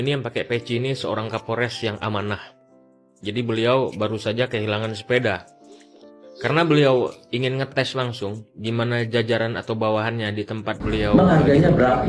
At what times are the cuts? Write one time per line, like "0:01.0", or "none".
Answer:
0:11.1